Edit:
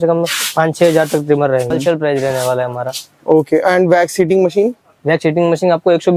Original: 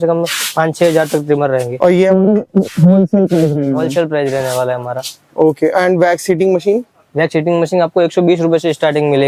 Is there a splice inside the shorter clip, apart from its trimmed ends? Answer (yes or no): yes